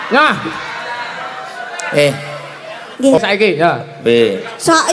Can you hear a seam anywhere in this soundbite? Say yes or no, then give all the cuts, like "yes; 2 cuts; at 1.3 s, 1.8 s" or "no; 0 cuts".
yes; 1 cut; at 3.2 s